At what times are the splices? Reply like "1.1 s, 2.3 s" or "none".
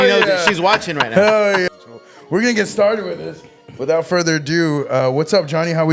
1.7 s